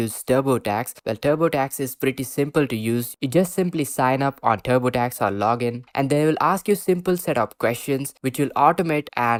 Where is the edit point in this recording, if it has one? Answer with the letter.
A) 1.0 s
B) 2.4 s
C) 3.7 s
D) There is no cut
D